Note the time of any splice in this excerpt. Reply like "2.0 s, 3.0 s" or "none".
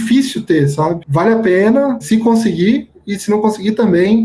1.0 s, 2.0 s